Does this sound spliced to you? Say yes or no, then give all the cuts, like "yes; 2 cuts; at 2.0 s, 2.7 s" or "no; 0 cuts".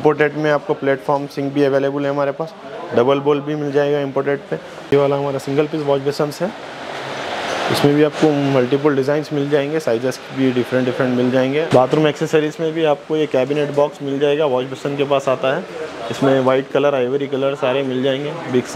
yes; 2 cuts; at 4.7 s, 11.7 s